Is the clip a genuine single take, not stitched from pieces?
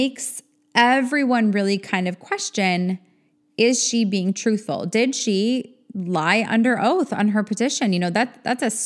yes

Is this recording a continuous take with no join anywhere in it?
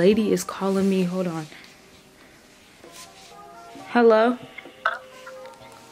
yes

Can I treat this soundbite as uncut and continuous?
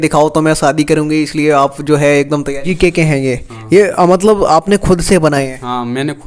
no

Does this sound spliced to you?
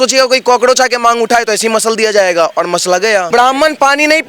yes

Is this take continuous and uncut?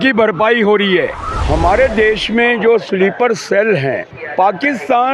no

